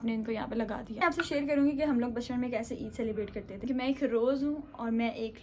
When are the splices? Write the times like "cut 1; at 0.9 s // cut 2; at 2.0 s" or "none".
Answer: cut 1; at 1.0 s // cut 2; at 3.7 s